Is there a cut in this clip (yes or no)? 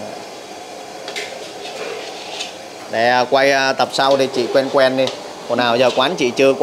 no